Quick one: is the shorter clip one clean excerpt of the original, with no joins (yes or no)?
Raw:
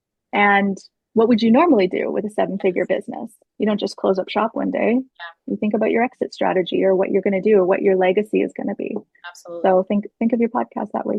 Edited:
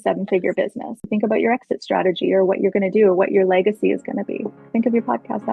no